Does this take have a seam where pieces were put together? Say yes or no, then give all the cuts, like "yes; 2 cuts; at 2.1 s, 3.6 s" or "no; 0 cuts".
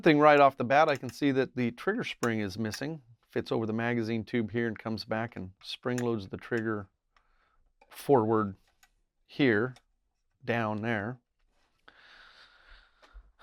no; 0 cuts